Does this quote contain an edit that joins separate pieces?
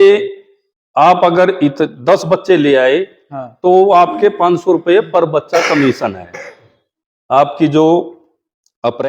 no; 0 cuts

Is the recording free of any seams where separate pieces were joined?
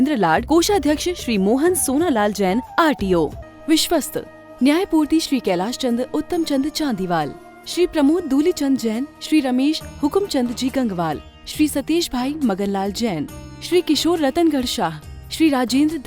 no; 1 cut; at 3.4 s

